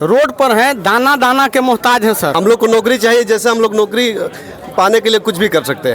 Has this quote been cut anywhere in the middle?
yes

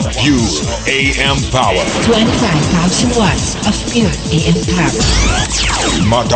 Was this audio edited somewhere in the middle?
no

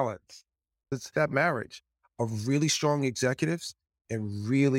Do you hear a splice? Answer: yes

